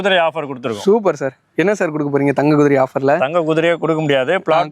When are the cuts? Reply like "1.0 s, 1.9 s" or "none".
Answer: none